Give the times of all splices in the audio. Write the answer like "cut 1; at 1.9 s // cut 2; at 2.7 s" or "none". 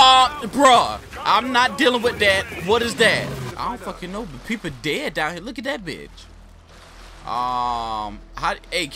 cut 1; at 3.5 s